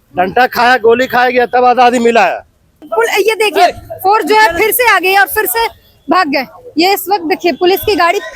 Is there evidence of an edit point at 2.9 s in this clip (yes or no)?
yes